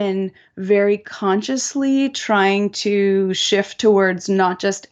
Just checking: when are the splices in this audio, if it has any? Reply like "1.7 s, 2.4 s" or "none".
none